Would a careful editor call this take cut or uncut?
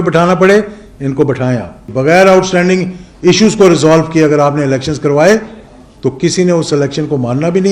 cut